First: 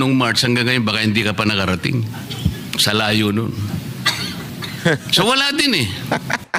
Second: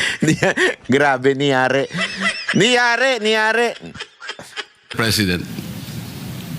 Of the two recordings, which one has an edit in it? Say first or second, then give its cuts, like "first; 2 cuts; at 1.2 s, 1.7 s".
second; 1 cut; at 4.9 s